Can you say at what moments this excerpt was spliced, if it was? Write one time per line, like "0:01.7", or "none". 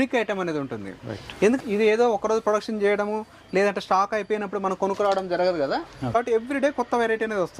0:01.6
0:06.2